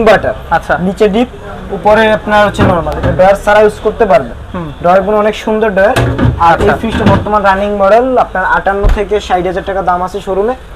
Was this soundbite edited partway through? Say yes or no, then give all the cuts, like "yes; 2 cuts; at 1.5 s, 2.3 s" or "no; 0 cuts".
no; 0 cuts